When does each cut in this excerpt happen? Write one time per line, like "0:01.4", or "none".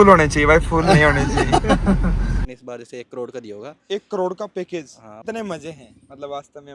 0:02.5
0:05.2